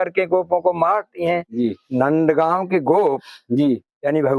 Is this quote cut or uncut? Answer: cut